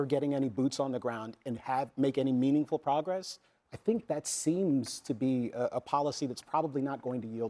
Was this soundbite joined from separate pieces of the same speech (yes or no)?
no